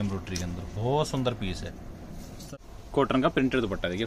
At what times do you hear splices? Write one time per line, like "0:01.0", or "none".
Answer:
0:02.5